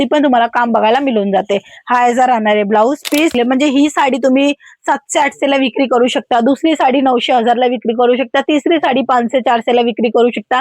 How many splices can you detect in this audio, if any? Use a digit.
1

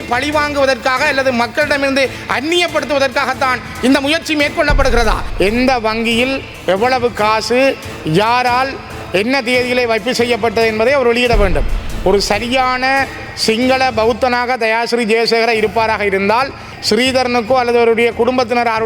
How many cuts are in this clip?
2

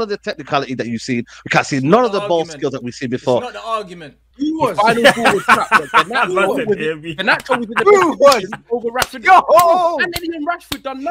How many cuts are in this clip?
1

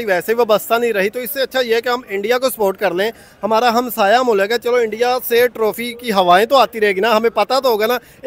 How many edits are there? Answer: 0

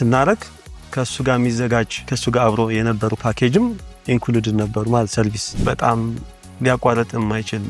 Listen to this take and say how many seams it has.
2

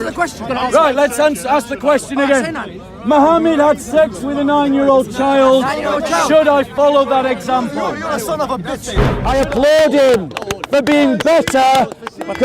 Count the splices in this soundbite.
1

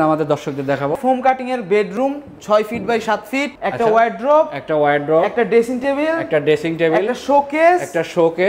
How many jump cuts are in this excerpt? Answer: 2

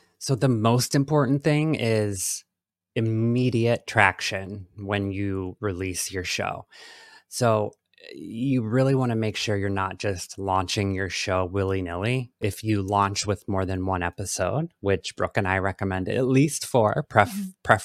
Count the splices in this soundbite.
1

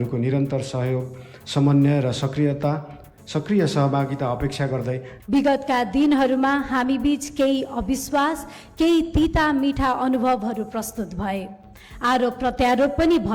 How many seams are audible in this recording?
1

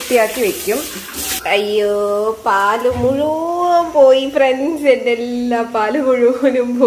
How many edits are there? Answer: 1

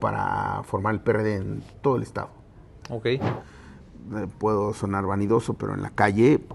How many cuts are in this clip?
1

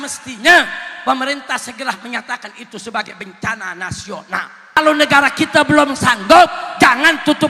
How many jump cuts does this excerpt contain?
1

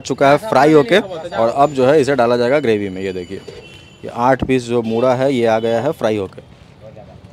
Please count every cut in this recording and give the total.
0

